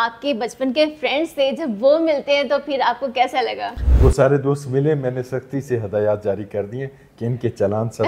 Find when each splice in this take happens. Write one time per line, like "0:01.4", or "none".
0:03.8